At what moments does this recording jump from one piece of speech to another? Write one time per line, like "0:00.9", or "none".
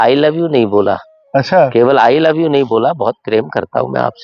0:01.1